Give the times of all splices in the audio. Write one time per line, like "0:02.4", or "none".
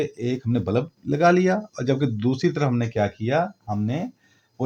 none

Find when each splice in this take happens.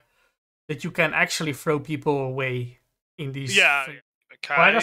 0:03.9

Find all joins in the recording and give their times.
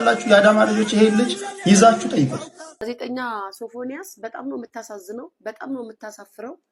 0:02.7

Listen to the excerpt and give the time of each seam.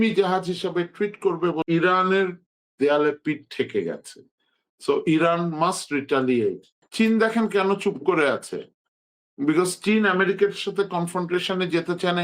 0:01.6
0:06.8

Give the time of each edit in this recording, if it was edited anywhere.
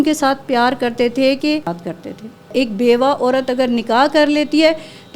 0:02.2

